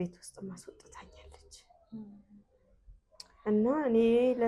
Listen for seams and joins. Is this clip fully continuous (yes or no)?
yes